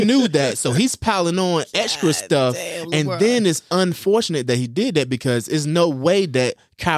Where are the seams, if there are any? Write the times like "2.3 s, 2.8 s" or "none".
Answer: none